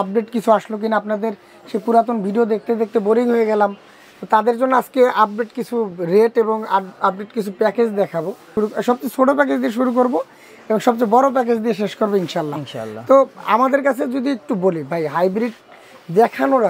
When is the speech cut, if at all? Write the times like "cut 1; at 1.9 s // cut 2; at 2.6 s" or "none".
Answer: none